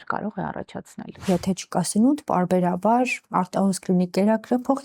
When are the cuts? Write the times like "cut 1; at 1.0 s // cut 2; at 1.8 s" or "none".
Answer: cut 1; at 1.2 s